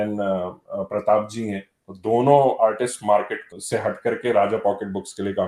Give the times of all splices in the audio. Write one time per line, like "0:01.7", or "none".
0:03.4